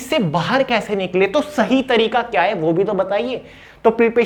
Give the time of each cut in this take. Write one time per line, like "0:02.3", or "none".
none